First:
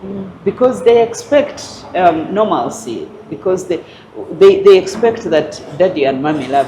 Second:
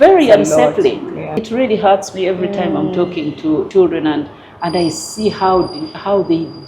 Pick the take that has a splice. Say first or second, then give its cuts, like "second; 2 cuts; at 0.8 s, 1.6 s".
second; 2 cuts; at 1.3 s, 3.7 s